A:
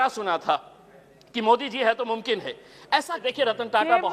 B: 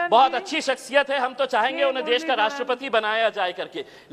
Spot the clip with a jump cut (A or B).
A